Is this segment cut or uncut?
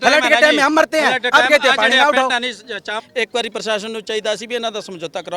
cut